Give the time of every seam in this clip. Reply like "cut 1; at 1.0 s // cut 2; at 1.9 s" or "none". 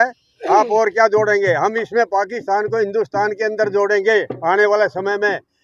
none